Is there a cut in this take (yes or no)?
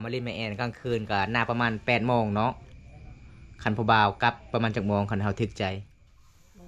no